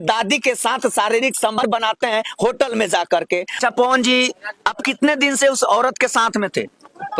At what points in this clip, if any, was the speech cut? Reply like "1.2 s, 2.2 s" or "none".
1.6 s, 3.5 s